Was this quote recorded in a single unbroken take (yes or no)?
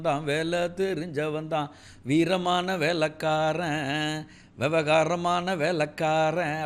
yes